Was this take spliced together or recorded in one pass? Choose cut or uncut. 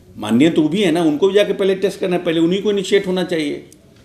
uncut